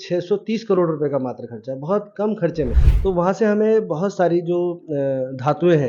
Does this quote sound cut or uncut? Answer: cut